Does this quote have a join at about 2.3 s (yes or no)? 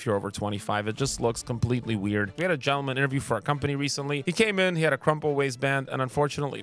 yes